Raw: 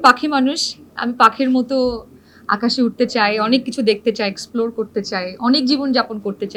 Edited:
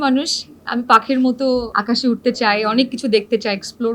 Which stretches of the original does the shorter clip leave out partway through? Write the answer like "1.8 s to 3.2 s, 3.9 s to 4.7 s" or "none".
2.0 s to 2.5 s